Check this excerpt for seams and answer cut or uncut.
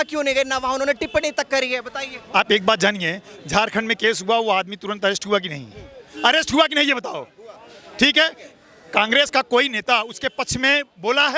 uncut